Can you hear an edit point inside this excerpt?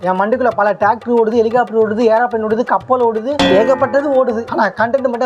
no; 0 cuts

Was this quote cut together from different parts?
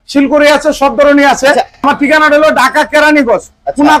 yes; 1 cut; at 1.8 s

